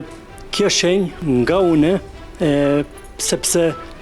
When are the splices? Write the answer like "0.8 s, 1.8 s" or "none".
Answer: 1.2 s